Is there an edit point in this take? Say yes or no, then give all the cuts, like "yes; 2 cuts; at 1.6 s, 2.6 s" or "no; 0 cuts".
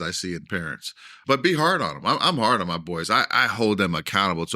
yes; 1 cut; at 1.2 s